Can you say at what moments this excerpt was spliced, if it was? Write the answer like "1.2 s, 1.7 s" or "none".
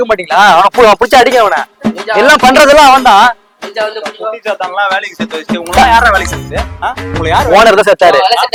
none